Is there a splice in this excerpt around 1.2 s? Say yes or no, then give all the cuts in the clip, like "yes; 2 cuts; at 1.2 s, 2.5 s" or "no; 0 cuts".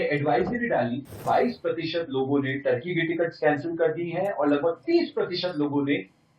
yes; 1 cut; at 1.2 s